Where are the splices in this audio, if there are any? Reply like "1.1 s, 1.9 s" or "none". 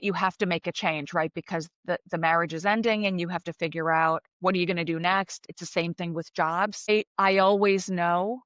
4.3 s, 5.4 s, 6.9 s